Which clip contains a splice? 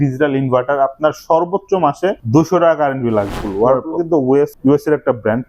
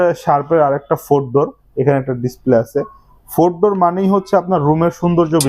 first; 3 cuts; at 2.2 s, 3.4 s, 4.5 s

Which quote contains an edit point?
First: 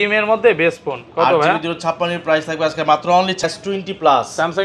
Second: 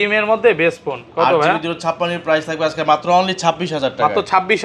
first; 1 cut; at 3.4 s

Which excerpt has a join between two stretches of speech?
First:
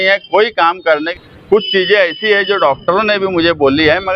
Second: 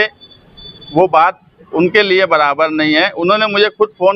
first; 1 cut; at 1.1 s

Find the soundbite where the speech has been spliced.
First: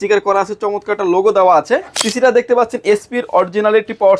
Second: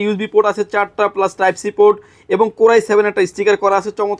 first; 1 cut; at 2.0 s

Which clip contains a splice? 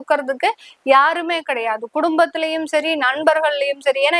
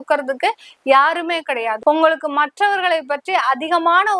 second; 1 cut; at 1.7 s

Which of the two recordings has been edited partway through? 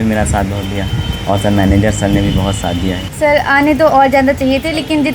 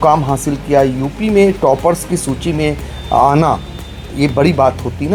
first; 1 cut; at 3.0 s

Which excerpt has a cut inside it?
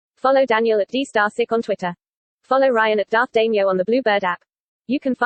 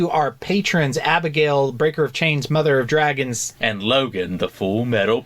second; 1 cut; at 3.4 s

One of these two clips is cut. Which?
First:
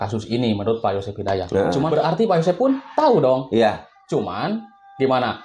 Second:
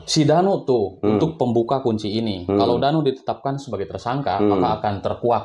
first; 1 cut; at 1.9 s

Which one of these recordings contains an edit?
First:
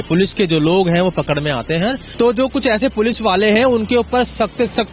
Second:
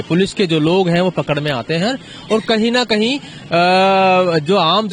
first; 1 cut; at 2.0 s

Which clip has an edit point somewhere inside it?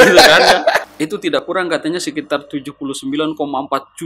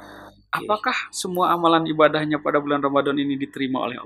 first; 1 cut; at 1.4 s

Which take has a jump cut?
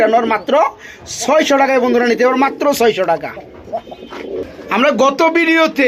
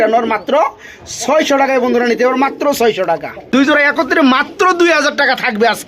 second; 1 cut; at 3.3 s

